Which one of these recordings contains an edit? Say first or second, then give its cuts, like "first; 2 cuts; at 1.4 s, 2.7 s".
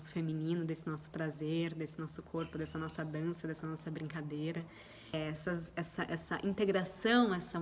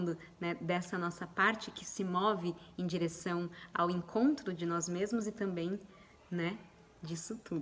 first; 1 cut; at 5.1 s